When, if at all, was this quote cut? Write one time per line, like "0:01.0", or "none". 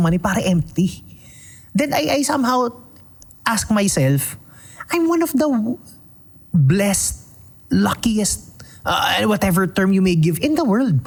none